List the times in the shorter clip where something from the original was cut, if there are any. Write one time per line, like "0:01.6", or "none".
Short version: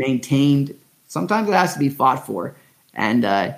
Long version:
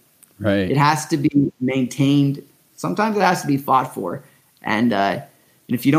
none